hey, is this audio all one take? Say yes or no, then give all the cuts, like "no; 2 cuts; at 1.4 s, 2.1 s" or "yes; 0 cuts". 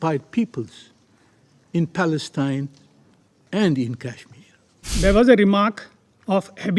no; 1 cut; at 4.9 s